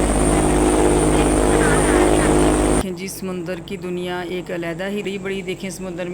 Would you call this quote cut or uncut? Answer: cut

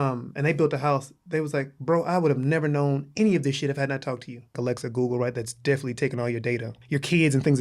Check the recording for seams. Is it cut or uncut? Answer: cut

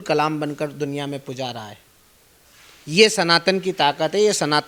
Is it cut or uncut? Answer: uncut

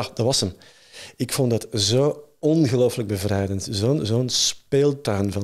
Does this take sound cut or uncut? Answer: uncut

